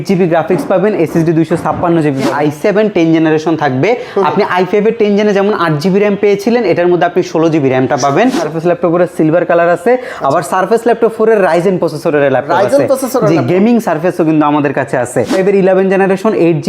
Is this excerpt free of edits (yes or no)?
no